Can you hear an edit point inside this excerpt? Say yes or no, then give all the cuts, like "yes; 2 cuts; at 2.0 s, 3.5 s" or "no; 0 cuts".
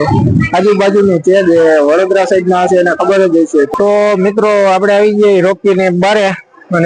yes; 1 cut; at 3.7 s